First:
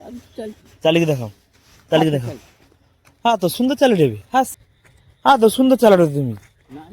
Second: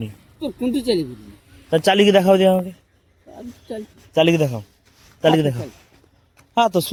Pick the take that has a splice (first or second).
first